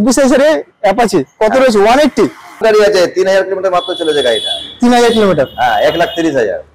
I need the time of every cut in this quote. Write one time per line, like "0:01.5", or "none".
0:02.6